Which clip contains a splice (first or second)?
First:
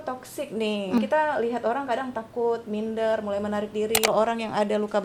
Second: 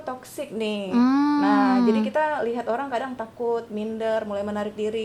first